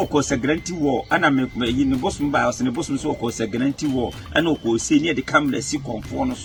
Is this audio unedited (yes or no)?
yes